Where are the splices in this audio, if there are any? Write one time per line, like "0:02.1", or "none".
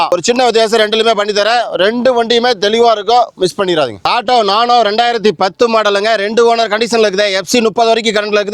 0:04.0